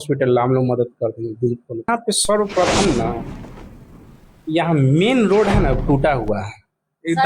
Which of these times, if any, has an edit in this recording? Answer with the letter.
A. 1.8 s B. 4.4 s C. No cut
A